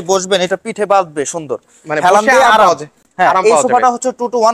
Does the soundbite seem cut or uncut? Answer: uncut